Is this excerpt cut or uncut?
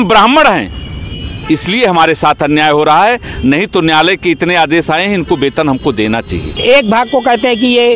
cut